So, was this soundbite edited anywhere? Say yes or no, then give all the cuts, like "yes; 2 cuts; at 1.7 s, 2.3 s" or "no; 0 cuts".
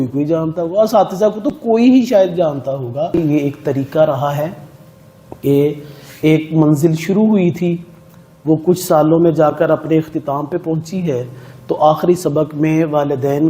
yes; 1 cut; at 3.1 s